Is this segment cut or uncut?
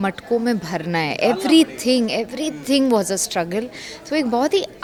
uncut